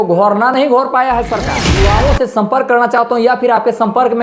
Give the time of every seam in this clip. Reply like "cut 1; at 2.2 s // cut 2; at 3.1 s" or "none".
cut 1; at 1.8 s